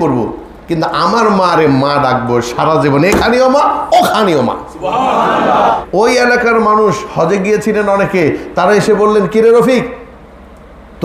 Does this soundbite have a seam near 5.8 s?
yes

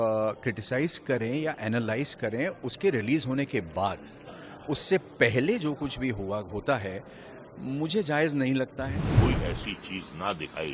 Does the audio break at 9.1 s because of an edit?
yes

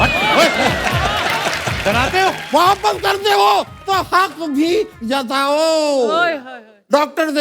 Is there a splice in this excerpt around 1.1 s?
no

